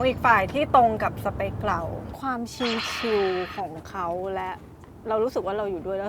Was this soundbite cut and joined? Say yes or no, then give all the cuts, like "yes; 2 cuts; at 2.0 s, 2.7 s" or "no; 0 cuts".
yes; 2 cuts; at 2.1 s, 4.9 s